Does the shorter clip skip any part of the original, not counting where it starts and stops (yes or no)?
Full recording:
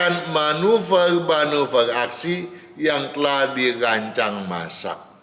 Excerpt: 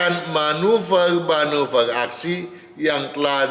no